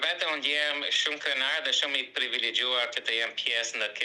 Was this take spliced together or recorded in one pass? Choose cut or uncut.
uncut